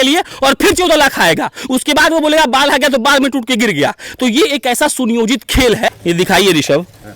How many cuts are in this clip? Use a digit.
1